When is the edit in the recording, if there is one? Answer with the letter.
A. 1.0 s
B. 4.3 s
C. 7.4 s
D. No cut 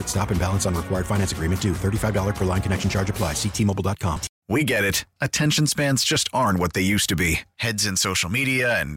B